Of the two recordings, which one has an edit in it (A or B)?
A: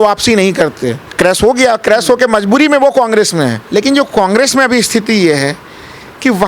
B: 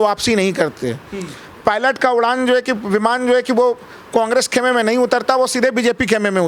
A